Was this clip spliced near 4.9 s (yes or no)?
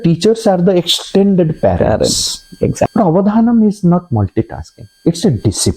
no